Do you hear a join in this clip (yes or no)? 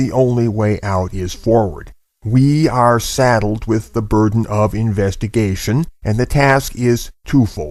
no